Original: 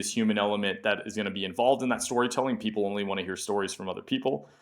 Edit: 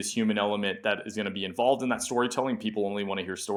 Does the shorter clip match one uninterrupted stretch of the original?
yes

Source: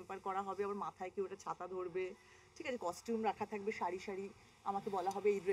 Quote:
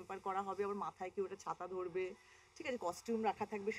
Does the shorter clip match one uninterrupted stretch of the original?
yes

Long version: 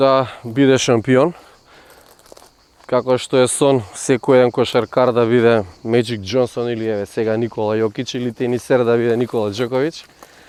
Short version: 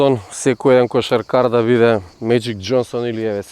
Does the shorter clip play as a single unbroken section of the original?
yes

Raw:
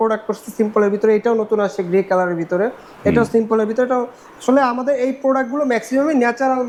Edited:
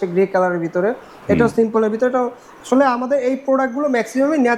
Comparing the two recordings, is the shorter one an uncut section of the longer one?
yes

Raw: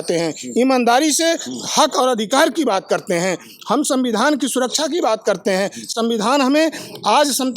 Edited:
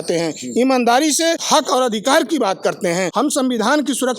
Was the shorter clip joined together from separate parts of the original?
yes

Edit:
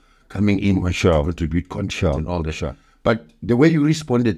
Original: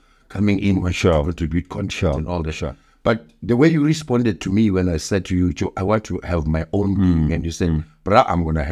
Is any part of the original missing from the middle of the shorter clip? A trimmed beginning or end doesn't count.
no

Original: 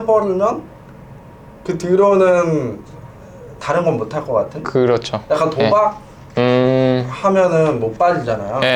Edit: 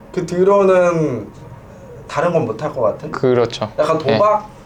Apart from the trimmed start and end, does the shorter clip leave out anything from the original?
no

